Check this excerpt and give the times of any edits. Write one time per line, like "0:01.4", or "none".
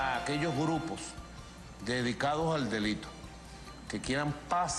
none